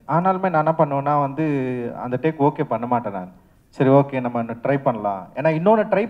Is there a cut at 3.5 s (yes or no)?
no